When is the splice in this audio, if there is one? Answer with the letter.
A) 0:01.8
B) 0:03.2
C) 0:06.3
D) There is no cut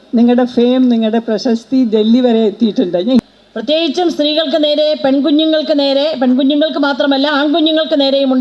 B